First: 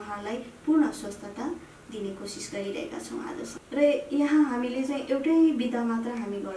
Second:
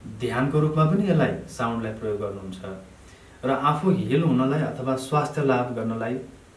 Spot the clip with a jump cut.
first; 1 cut; at 3.6 s

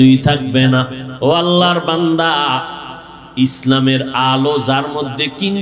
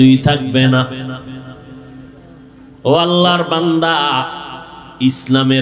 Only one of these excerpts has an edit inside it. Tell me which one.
first; 1 cut; at 1.0 s

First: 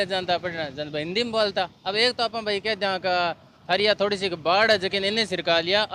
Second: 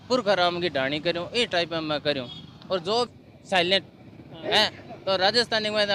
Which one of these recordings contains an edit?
second; 1 cut; at 3.1 s

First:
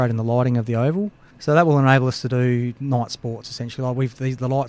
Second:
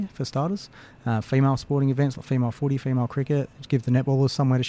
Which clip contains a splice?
first; 1 cut; at 1.3 s

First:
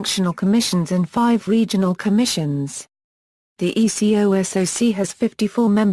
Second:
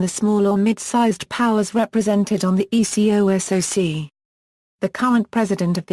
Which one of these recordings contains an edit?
second; 1 cut; at 1.5 s

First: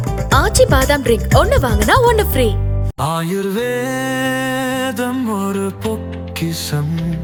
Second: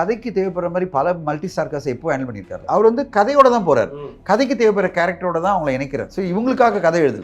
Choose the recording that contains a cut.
second; 2 cuts; at 2.6 s, 6.1 s

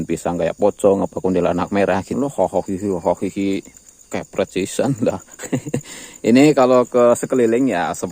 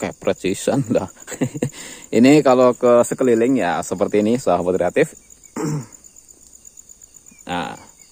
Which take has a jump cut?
first; 1 cut; at 2.1 s

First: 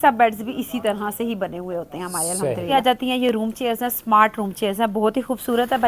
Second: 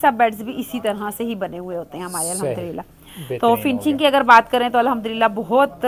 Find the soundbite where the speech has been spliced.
first; 1 cut; at 2.8 s

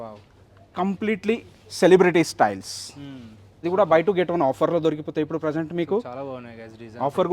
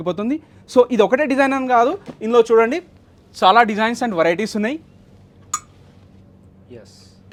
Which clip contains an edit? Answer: first; 1 cut; at 3.6 s

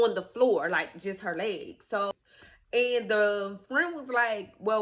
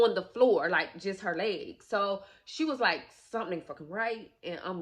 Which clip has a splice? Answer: first; 1 cut; at 2.1 s

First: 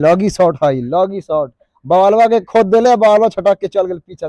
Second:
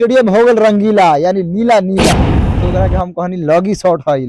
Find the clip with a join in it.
second; 1 cut; at 2.5 s

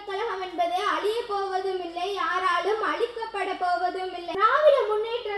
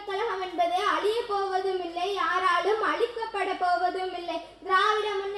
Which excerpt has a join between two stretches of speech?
first; 1 cut; at 4.4 s

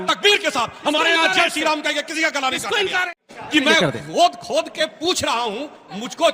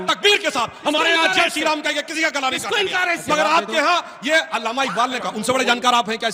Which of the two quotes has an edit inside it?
first; 1 cut; at 3.1 s

